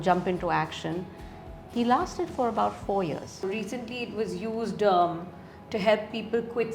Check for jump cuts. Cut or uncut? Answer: cut